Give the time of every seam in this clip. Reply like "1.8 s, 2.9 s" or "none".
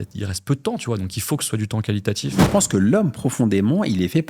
2.4 s